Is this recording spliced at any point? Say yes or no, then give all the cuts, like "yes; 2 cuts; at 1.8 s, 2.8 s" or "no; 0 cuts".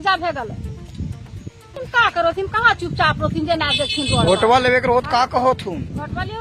yes; 1 cut; at 1.8 s